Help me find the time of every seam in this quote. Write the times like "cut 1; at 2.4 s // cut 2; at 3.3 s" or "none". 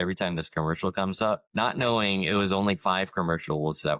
cut 1; at 1.5 s